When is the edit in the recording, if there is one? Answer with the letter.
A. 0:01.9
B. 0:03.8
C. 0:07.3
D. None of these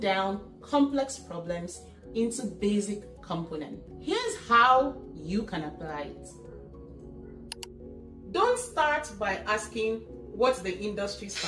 B